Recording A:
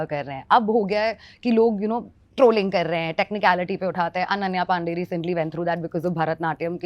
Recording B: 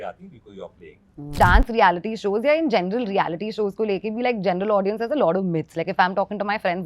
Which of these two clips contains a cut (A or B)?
B